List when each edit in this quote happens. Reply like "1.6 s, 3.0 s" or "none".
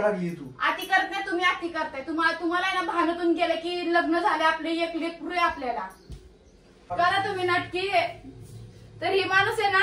6.9 s